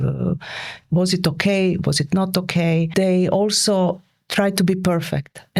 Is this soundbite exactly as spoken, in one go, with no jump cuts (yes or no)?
no